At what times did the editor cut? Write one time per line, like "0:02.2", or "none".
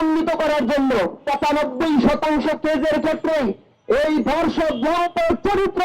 0:01.2